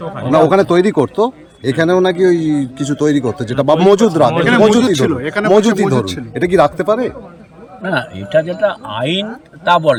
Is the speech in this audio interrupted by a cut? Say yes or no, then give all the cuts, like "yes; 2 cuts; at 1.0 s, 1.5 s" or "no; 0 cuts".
no; 0 cuts